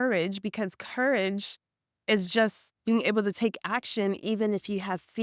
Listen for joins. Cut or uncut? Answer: uncut